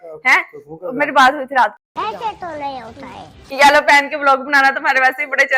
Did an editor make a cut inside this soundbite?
no; 0 cuts

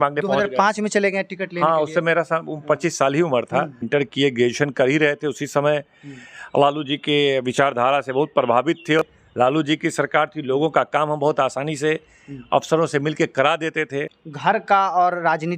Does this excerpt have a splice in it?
yes; 3 cuts; at 3.8 s, 9.1 s, 14.2 s

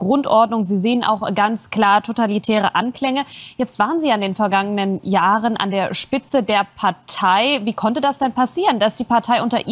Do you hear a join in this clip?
no; 0 cuts

